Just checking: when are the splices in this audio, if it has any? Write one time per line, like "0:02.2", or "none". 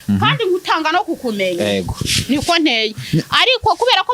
none